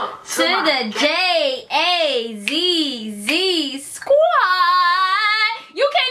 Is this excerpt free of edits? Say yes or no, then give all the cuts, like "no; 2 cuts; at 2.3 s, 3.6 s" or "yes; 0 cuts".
yes; 0 cuts